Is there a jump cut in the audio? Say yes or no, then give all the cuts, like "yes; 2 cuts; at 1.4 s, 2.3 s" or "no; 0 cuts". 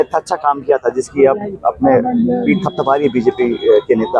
no; 0 cuts